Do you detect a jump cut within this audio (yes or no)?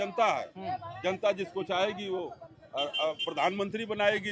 no